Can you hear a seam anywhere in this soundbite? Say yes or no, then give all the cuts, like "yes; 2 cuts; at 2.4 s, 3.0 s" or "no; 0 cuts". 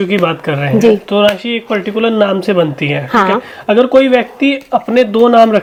no; 0 cuts